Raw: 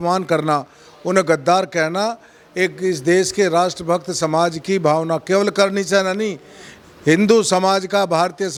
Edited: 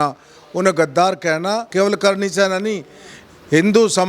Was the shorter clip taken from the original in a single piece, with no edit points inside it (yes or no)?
no